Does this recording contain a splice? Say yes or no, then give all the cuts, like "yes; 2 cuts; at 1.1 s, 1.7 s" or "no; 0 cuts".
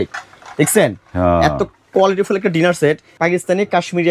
yes; 1 cut; at 3.1 s